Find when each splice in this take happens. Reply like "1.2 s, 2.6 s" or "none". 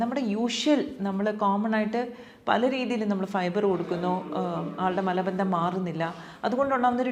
none